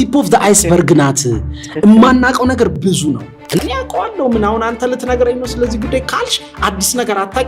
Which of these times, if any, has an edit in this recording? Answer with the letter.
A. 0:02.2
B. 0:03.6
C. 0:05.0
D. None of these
B